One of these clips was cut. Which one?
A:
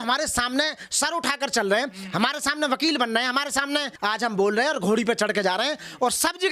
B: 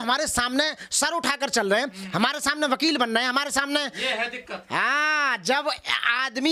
A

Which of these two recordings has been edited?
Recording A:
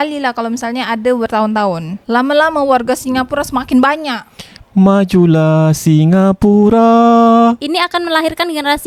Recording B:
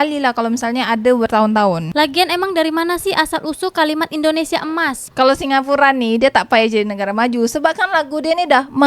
B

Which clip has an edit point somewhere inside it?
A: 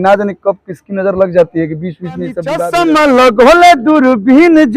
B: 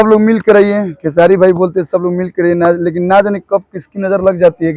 A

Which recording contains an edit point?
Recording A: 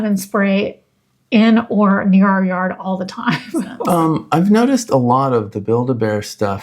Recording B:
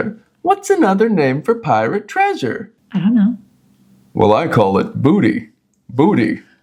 A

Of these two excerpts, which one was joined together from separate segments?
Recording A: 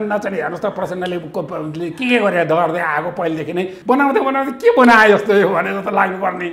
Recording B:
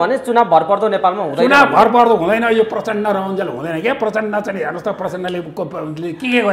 A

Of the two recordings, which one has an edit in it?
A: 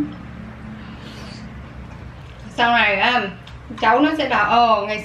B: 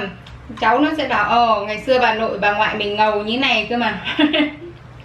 A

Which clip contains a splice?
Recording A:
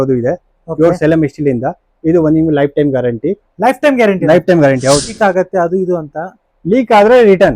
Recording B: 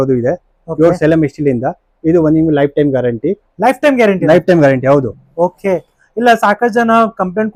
A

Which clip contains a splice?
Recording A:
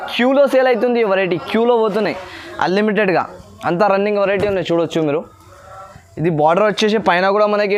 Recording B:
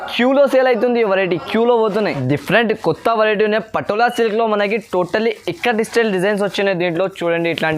B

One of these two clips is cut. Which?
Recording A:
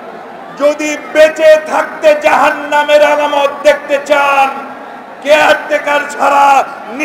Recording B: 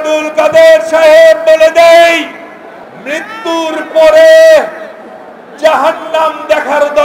B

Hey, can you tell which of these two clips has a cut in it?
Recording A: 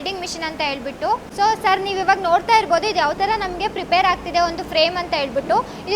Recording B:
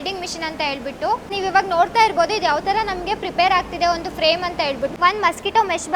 B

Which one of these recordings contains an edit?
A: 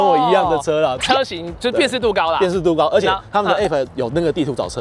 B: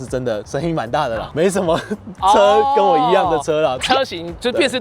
B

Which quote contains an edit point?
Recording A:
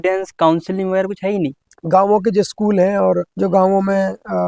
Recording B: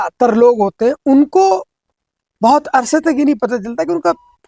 A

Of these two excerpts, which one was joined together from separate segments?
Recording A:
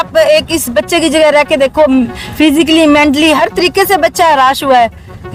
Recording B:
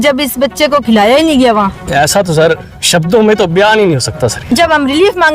B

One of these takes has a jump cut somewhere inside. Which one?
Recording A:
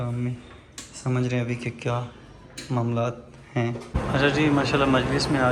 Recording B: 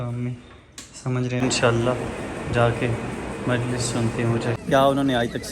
B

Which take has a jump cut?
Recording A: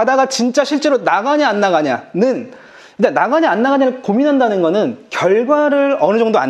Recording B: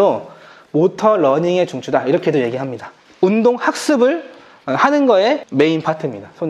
B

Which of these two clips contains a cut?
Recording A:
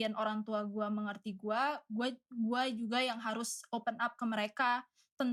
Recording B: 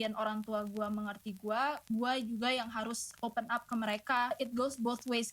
B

